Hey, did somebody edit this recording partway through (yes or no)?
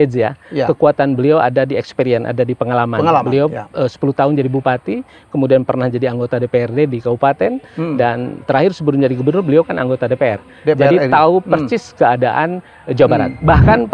no